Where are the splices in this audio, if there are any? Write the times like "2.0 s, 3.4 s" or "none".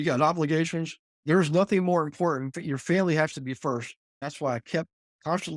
4.2 s